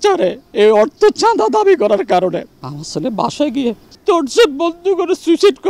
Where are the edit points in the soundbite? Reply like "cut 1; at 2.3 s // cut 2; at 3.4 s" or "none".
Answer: cut 1; at 2.6 s // cut 2; at 3.9 s